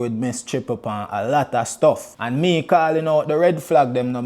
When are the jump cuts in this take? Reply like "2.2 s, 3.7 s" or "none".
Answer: 2.1 s